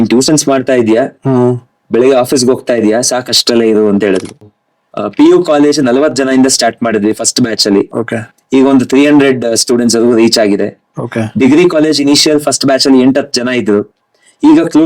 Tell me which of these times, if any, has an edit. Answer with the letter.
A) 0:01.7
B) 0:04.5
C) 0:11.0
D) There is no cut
B